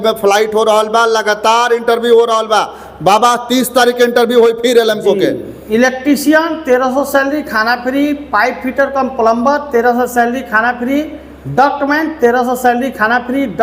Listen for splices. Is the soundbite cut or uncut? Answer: uncut